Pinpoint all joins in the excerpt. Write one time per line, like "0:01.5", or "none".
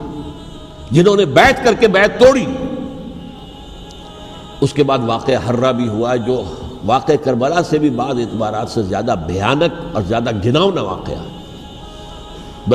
0:03.5